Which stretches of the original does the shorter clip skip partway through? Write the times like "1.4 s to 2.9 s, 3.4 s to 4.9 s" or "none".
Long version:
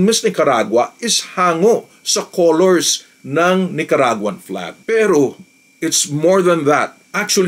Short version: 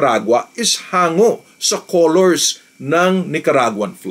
none